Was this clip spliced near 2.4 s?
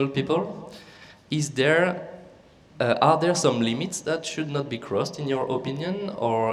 no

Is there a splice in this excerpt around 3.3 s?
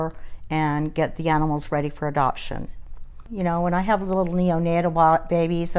yes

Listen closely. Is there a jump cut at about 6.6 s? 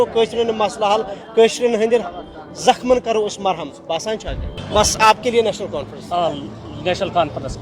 no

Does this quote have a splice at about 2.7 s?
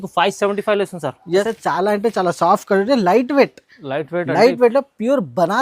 no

